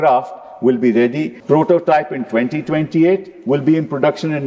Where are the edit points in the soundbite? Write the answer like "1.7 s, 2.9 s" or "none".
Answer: 1.3 s